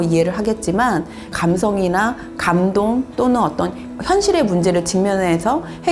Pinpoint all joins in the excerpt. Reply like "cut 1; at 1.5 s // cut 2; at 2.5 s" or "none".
none